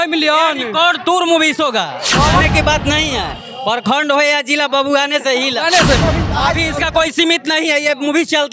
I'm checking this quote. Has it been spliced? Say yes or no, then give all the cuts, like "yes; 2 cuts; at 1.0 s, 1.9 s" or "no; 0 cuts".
yes; 2 cuts; at 2.4 s, 6.0 s